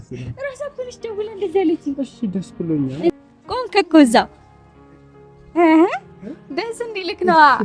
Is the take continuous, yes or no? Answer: no